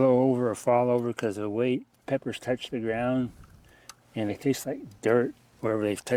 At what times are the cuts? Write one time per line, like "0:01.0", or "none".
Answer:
0:01.9
0:04.3